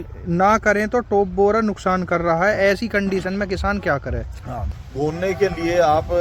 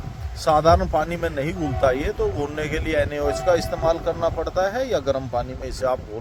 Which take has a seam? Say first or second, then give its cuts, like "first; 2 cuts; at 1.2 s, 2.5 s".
first; 1 cut; at 4.8 s